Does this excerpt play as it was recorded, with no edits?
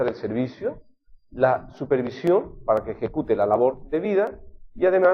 no; 1 cut; at 4.1 s

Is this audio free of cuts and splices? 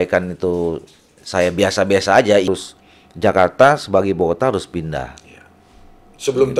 no; 1 cut; at 2.5 s

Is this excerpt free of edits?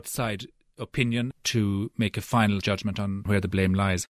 no; 2 cuts; at 1.3 s, 3.2 s

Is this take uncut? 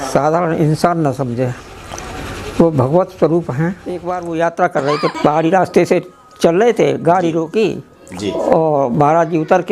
no; 1 cut; at 4.1 s

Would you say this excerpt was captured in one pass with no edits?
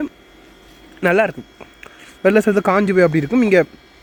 yes; 0 cuts

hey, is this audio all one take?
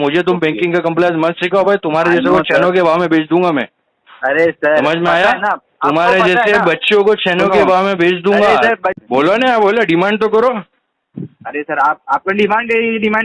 no; 1 cut; at 9.0 s

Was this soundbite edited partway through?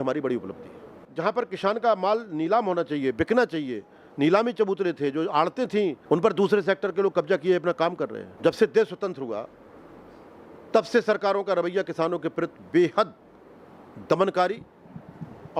yes; 3 cuts; at 1.0 s, 6.0 s, 8.2 s

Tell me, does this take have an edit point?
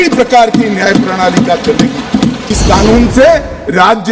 yes; 1 cut; at 2.5 s

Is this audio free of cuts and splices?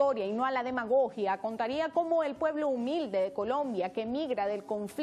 yes; 0 cuts

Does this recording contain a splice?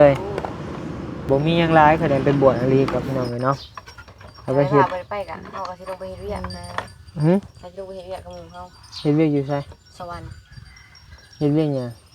yes; 1 cut; at 1.2 s

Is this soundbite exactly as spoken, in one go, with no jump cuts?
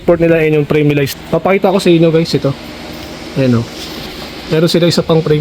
no; 1 cut; at 1.1 s

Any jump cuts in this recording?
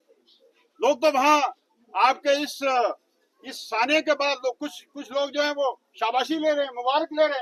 no; 0 cuts

